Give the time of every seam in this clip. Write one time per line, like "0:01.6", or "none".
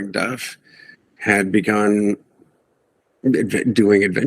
none